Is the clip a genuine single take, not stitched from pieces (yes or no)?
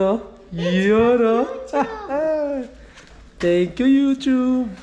yes